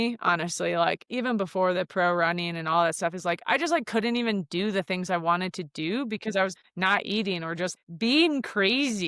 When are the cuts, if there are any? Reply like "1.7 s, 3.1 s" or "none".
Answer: 6.5 s, 7.7 s